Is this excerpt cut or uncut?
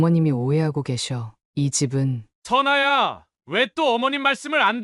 cut